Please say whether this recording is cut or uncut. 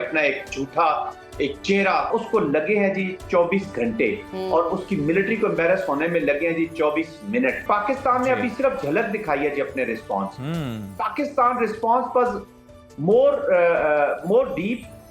cut